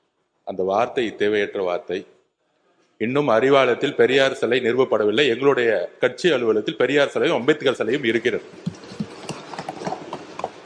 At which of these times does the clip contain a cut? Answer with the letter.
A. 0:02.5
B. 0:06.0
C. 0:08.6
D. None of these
D